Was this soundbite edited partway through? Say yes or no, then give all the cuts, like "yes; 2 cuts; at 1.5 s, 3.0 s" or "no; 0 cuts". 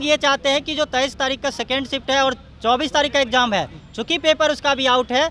no; 0 cuts